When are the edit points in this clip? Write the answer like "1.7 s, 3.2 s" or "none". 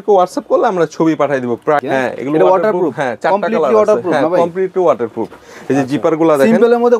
1.8 s